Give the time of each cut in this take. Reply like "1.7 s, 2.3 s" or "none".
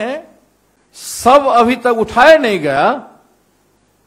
none

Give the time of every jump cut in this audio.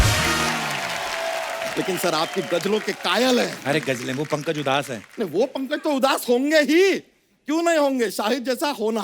none

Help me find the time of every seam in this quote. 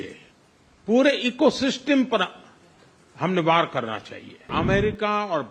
4.5 s

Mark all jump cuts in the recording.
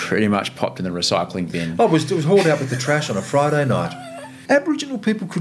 4.3 s

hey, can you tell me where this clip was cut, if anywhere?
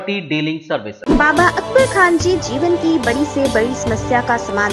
0.9 s

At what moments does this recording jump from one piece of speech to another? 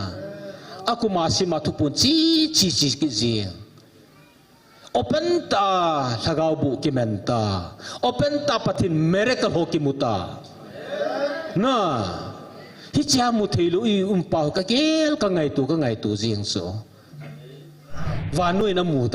18.2 s

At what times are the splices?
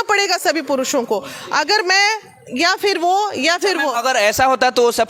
none

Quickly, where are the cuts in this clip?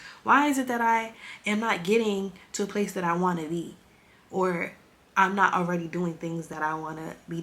6.5 s

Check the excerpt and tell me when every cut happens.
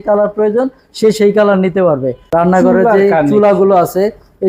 2.2 s

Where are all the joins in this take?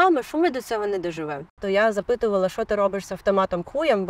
1.6 s

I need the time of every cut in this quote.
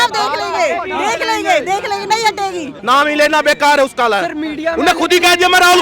2.7 s

